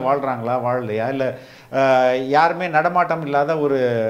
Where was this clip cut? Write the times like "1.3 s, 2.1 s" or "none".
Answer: none